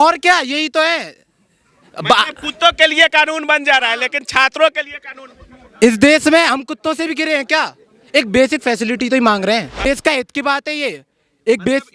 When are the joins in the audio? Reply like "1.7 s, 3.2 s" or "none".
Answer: 9.9 s